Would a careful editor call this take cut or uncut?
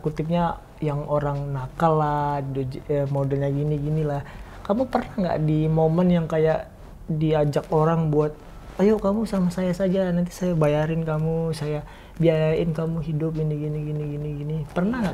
uncut